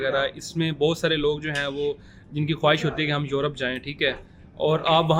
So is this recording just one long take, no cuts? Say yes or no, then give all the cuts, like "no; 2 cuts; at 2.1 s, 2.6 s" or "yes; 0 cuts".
yes; 0 cuts